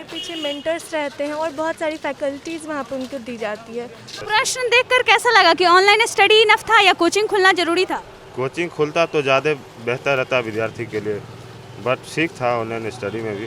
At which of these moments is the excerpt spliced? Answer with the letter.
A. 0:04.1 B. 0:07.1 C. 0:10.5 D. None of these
A